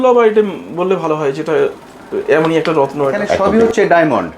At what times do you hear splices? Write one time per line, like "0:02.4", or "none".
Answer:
0:03.4